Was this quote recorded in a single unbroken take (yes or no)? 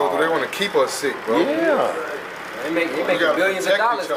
yes